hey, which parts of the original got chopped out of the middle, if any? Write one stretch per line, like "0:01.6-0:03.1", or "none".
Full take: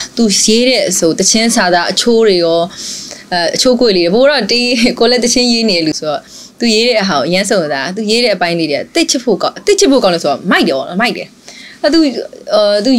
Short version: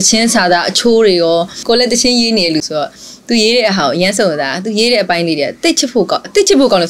0:02.8-0:04.9